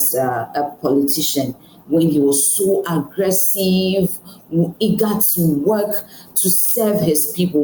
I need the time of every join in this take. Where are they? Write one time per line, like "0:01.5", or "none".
none